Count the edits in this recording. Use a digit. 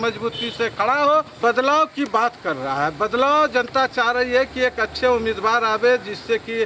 1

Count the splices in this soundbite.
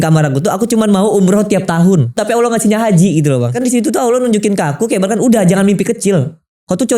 2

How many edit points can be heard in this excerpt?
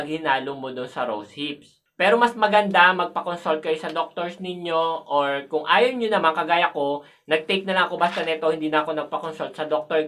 1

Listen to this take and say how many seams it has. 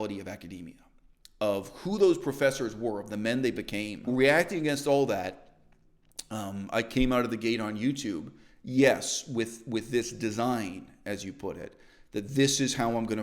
1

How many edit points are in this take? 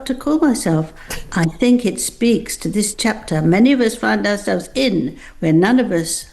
0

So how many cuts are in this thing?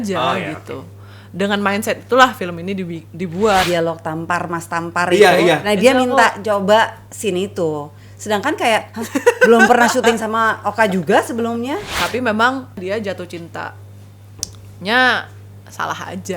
2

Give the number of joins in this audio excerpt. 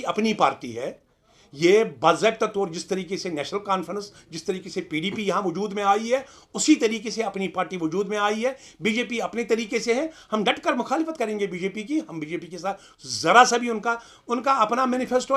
0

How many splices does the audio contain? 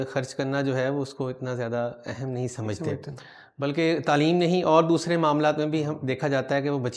0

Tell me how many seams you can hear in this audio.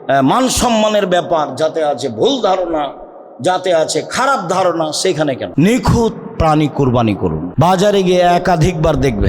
2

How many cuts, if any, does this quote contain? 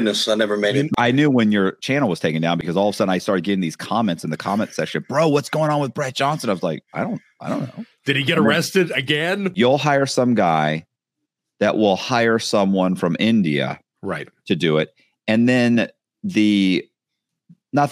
3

